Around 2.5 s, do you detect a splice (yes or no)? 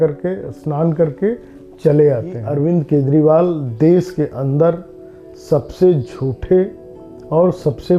yes